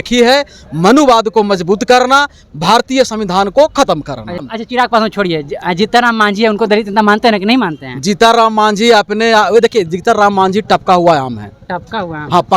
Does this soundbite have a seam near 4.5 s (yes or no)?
yes